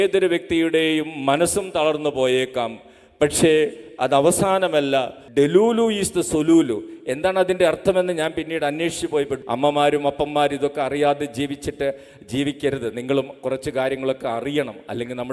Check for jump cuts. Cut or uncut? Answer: cut